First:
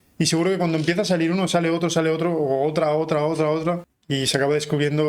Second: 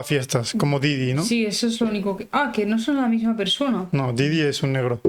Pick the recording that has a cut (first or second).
first